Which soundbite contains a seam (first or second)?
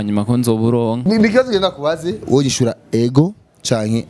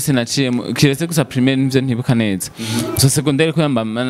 first